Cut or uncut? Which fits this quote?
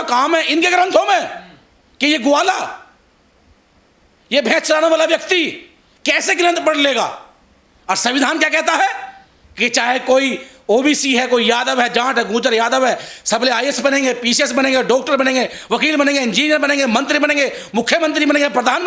uncut